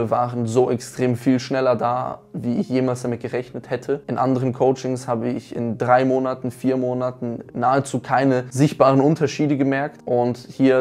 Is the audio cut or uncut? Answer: uncut